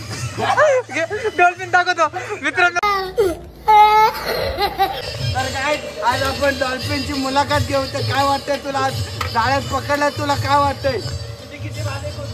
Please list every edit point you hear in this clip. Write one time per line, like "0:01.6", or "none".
0:05.0